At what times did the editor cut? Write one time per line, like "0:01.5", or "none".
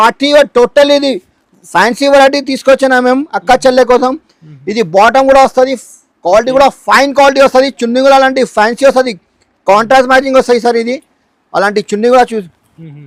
none

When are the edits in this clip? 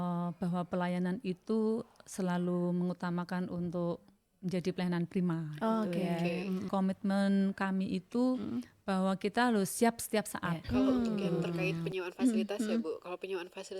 0:06.7
0:11.8

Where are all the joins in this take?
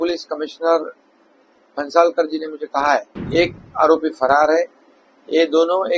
0:03.2

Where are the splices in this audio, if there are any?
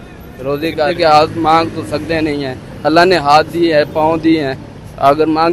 0:00.9

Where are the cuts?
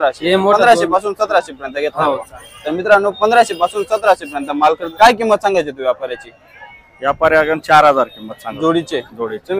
0:04.8

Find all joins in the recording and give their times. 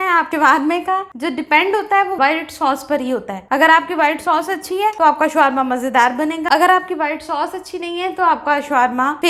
none

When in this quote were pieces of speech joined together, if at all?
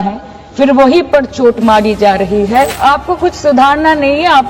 0:02.7

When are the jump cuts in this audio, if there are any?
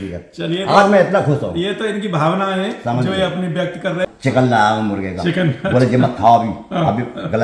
0:04.1

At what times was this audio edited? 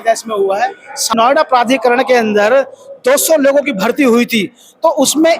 0:01.1

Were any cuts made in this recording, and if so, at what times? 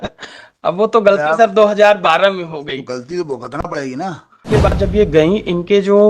0:04.4

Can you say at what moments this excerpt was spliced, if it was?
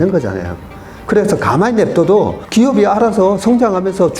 0:02.4

